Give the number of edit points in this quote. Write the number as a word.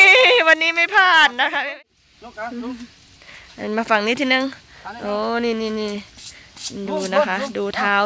one